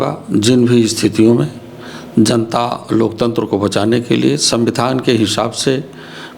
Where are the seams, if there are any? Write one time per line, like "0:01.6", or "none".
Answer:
none